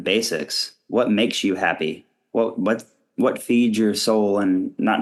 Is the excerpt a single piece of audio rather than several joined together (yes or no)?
yes